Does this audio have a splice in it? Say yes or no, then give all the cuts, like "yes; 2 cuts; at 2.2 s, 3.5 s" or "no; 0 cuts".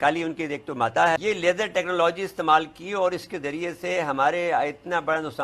yes; 1 cut; at 1.2 s